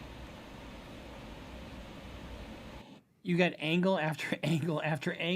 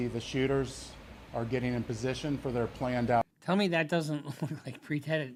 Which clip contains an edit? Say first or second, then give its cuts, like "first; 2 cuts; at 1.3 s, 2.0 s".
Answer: first; 1 cut; at 2.8 s